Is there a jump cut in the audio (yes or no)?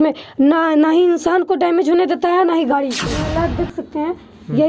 yes